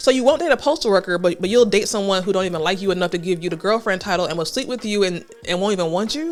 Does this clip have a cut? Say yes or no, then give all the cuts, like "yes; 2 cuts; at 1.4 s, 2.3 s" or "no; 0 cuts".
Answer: no; 0 cuts